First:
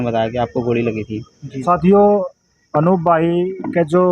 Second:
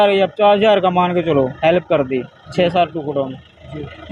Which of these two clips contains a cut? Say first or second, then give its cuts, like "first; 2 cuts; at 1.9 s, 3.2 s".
first; 1 cut; at 1.6 s